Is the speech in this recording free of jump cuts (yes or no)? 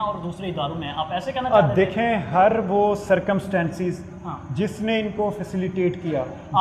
yes